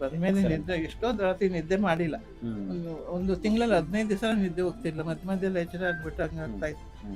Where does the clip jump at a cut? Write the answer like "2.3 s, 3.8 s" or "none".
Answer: none